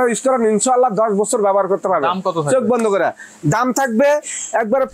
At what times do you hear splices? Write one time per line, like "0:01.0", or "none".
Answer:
none